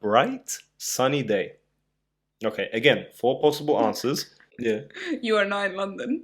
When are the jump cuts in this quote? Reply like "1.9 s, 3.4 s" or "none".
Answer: 4.5 s